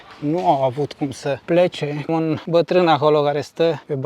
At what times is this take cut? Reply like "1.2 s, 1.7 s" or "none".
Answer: 2.3 s

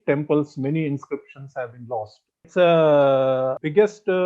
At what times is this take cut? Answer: 2.5 s

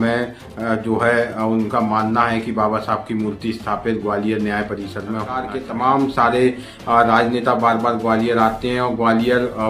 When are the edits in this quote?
5.5 s

